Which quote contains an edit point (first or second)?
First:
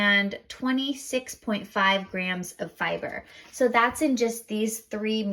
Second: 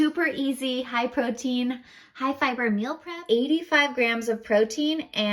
second